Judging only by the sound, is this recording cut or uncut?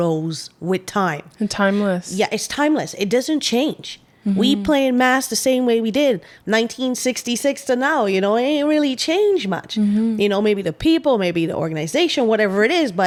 uncut